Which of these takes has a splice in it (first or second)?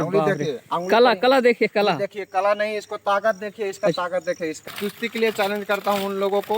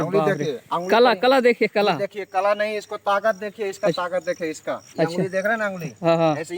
first